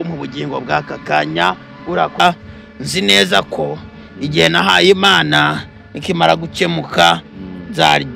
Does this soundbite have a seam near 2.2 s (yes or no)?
yes